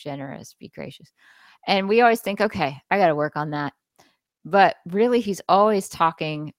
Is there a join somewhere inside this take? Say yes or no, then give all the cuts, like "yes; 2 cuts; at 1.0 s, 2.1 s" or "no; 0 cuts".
no; 0 cuts